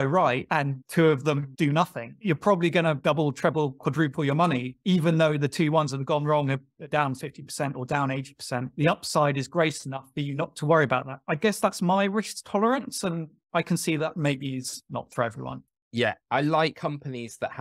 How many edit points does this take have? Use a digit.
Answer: 1